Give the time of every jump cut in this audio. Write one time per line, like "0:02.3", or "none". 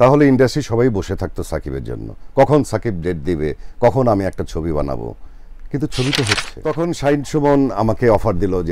0:06.5